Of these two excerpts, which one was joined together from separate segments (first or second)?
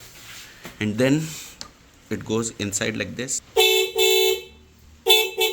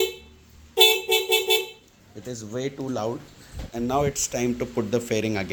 first